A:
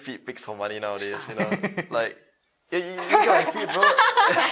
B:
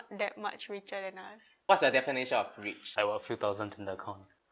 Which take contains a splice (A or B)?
B